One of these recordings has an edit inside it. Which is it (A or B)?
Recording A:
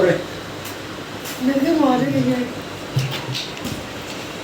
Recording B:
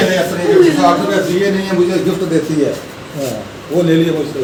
A